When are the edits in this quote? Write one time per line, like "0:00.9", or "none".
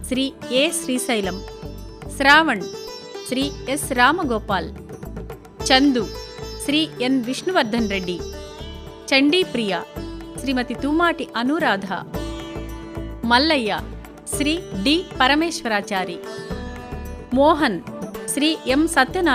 none